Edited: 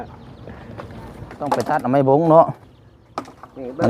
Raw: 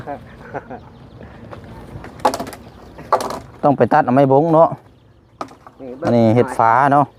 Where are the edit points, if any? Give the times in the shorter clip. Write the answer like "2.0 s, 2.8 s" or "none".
1.6 s